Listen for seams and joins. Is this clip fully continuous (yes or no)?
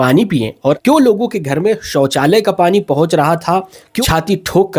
no